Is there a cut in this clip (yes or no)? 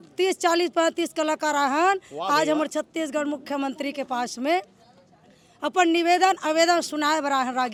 no